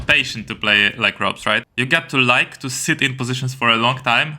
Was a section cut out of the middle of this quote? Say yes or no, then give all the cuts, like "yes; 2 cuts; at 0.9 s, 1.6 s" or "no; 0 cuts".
yes; 1 cut; at 1.7 s